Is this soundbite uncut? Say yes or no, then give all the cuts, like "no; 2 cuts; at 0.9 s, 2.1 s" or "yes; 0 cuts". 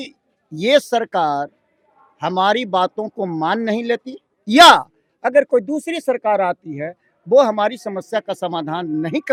yes; 0 cuts